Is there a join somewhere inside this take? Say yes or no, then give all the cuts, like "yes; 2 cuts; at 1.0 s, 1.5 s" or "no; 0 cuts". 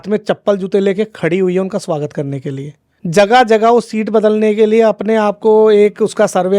yes; 1 cut; at 2.9 s